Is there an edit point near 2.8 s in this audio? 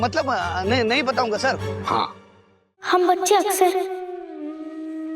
yes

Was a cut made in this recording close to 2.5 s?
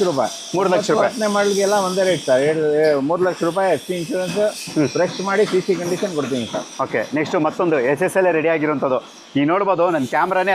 no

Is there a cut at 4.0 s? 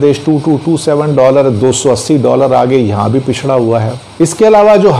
yes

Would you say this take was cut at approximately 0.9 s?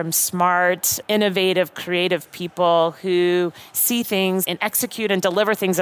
no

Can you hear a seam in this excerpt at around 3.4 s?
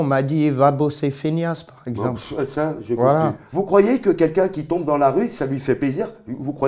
yes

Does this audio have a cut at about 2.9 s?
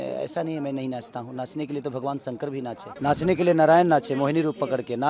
yes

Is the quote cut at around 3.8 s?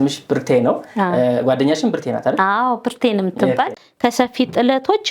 yes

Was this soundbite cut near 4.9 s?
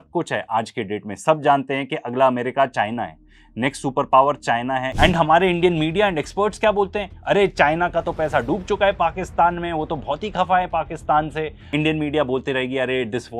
yes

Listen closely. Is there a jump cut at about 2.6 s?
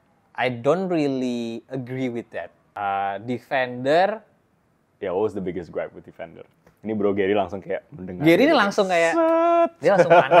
yes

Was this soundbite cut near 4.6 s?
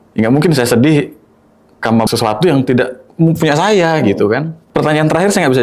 yes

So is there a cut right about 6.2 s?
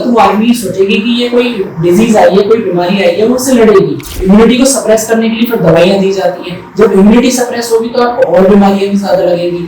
no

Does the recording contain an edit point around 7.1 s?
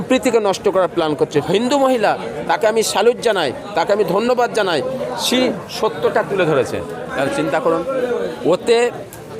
yes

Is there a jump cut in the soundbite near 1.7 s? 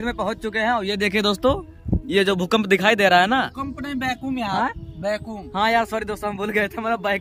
no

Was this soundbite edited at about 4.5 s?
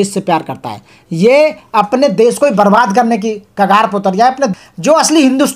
yes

